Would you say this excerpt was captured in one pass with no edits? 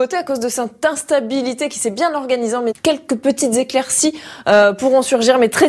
yes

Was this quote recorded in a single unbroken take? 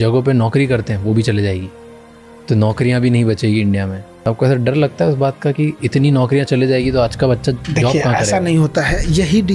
yes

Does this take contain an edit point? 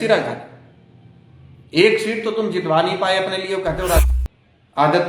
yes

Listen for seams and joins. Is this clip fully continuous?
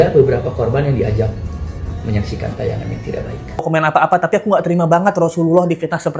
no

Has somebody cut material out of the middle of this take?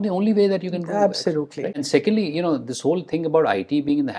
yes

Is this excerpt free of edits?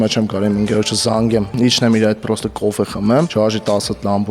no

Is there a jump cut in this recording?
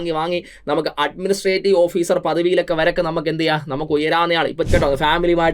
yes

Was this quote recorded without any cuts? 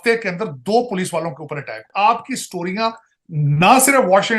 no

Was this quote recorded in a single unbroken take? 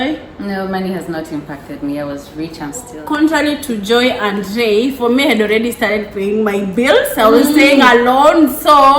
no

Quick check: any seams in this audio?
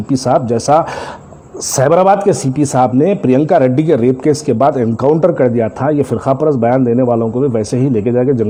no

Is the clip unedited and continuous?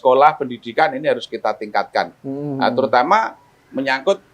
yes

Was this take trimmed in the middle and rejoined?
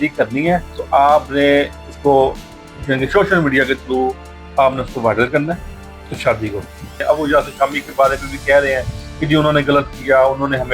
yes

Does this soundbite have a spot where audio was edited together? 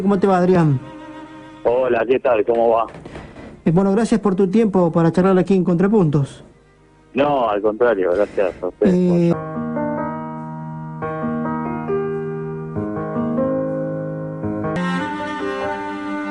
no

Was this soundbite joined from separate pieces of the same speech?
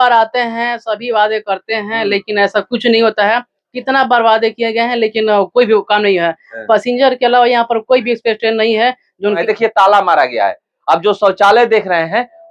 yes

